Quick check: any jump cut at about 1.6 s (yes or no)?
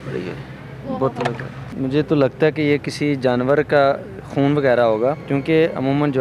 yes